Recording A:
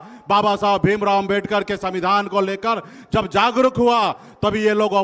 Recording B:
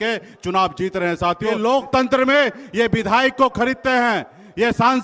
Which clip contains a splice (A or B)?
B